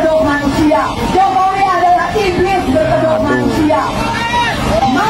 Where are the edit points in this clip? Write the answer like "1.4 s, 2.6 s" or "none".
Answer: none